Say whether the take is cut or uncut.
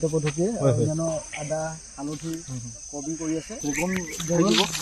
cut